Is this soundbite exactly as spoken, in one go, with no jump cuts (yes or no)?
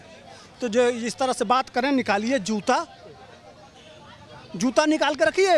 yes